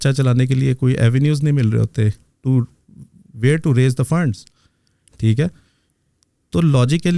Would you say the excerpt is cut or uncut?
uncut